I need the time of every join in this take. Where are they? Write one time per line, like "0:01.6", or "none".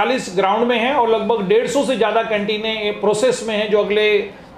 none